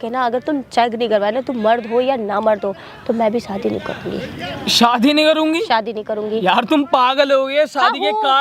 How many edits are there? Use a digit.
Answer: 0